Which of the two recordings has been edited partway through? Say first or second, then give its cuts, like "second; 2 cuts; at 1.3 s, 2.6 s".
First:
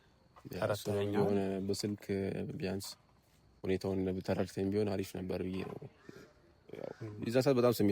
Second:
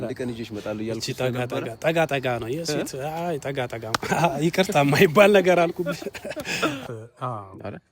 second; 1 cut; at 6.8 s